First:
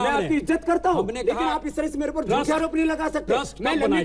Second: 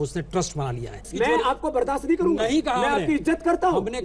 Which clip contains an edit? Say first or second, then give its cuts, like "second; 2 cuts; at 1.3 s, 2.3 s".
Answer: second; 1 cut; at 1.1 s